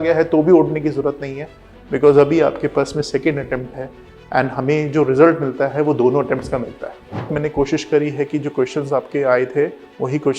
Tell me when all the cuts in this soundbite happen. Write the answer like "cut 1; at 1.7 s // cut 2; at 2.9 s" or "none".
cut 1; at 7.3 s